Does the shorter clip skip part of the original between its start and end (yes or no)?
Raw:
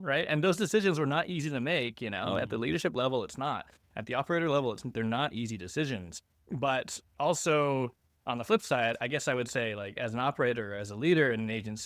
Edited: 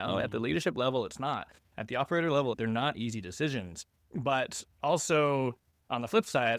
yes